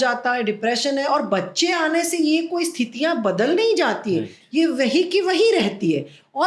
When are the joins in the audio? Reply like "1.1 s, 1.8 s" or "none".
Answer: none